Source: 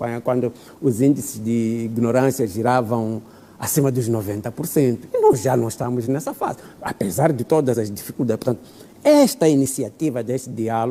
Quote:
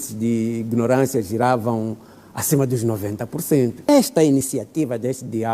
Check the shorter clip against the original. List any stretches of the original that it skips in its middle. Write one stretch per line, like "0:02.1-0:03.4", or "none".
0:05.1-0:09.1